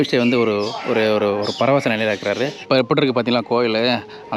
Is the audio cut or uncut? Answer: cut